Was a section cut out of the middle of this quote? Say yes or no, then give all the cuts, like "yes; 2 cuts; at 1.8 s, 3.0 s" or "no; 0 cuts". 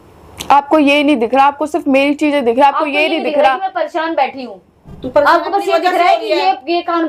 no; 0 cuts